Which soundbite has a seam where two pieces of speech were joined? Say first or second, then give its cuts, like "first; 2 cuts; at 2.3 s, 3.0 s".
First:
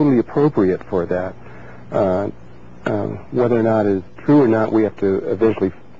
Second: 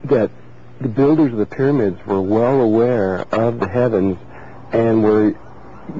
second; 1 cut; at 4.0 s